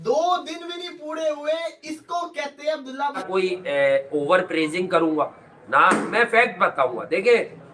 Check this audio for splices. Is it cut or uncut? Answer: cut